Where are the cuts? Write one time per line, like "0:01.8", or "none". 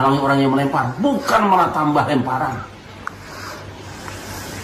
none